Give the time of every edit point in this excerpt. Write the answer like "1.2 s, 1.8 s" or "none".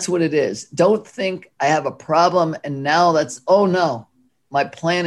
none